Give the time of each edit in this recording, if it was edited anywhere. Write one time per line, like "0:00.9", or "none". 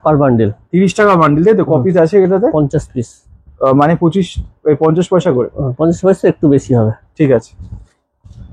none